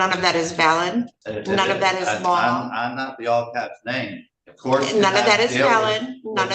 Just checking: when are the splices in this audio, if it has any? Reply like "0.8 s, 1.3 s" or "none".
1.2 s